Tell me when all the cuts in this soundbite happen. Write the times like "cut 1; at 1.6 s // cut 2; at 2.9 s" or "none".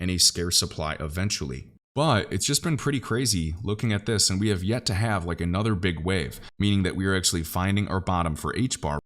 cut 1; at 6.4 s